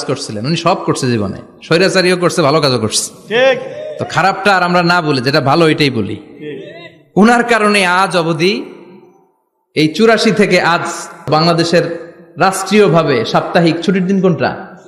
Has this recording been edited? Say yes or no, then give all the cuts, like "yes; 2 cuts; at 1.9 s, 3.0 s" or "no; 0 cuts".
yes; 1 cut; at 11.3 s